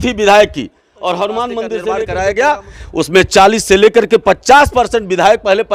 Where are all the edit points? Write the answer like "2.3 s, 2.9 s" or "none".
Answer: 1.9 s